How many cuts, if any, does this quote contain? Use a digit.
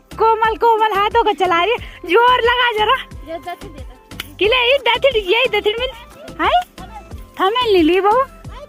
0